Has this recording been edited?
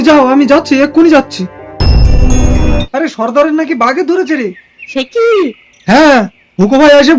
yes; 1 cut; at 2.8 s

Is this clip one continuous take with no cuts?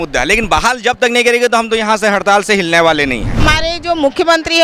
no; 1 cut; at 3.4 s

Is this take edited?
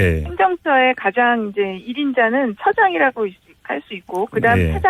no; 0 cuts

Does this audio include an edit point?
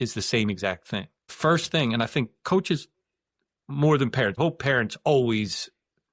yes; 2 cuts; at 1.2 s, 4.4 s

